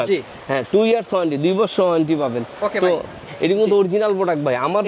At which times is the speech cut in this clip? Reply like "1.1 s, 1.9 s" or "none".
3.3 s